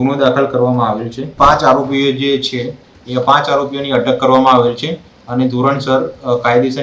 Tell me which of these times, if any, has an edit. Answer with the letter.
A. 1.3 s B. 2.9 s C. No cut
A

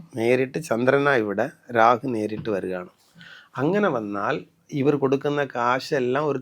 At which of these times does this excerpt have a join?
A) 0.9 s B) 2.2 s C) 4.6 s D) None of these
C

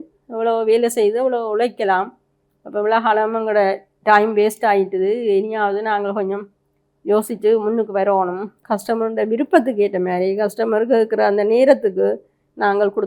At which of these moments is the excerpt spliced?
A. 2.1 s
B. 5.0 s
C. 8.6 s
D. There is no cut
C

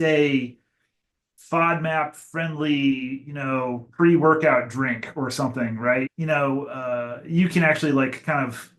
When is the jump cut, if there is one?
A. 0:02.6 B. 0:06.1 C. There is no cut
B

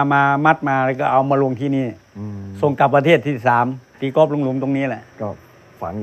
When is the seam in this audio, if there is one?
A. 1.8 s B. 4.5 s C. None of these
C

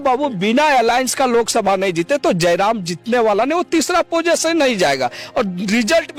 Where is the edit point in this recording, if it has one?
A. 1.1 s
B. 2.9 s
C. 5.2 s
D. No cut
D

